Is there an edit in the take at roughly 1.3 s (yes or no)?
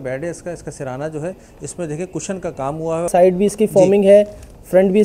no